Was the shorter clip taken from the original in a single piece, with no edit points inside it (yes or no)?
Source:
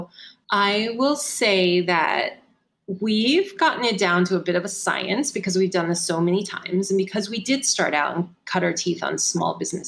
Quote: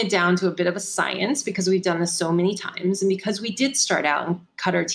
yes